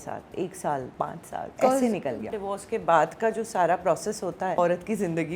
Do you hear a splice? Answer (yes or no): yes